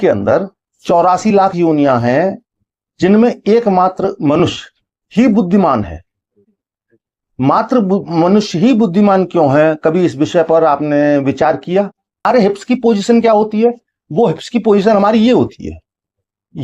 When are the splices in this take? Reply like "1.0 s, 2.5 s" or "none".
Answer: 12.2 s